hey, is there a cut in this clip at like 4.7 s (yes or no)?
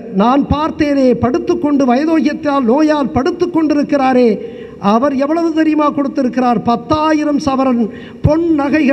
no